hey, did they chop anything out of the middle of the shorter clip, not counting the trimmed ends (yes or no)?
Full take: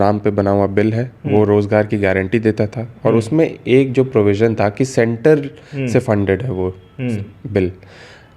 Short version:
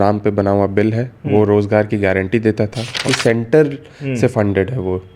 yes